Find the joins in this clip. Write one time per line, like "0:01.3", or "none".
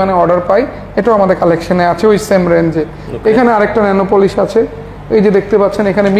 none